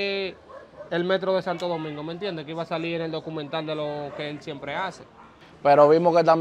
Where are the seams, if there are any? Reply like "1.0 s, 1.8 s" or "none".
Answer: none